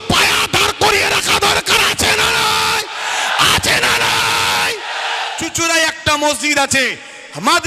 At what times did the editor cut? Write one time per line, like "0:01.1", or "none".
0:05.4